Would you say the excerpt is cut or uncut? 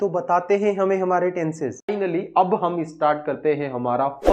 cut